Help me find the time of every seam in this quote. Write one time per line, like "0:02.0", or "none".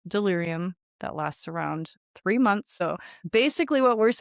0:00.9
0:02.7